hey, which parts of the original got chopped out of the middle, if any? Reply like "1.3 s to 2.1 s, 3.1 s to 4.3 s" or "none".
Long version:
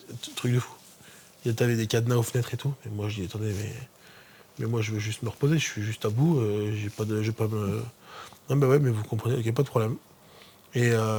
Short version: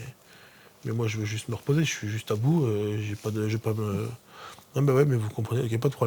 none